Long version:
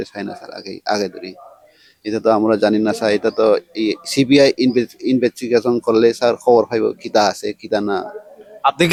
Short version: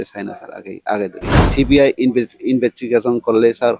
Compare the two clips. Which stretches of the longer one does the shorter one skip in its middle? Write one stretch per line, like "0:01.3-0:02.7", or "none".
0:01.4-0:04.0